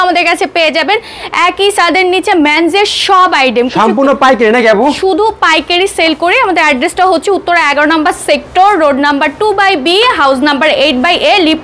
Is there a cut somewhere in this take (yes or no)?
no